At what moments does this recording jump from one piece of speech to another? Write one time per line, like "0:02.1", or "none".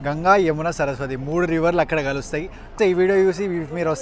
0:02.7

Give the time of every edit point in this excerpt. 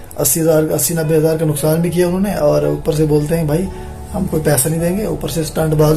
none

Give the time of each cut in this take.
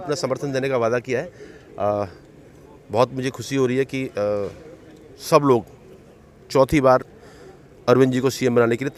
none

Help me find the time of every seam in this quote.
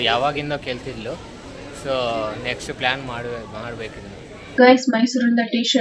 none

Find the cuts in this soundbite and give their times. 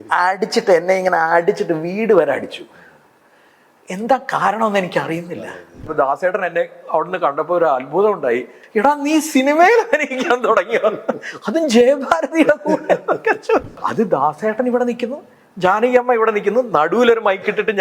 0:05.9
0:08.6
0:13.8

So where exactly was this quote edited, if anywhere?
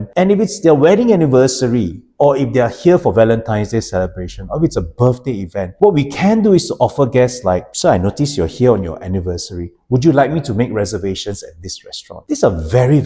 none

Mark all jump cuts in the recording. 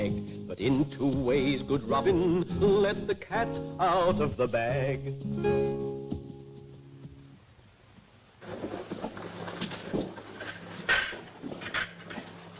0:09.3

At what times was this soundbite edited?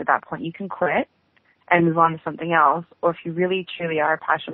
none

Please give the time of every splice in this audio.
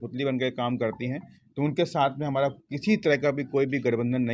none

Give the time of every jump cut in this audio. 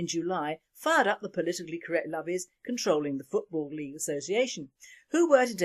0:02.1

